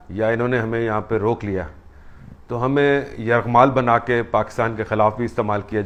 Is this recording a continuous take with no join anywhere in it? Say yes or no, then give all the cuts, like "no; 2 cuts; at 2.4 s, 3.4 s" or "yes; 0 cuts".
yes; 0 cuts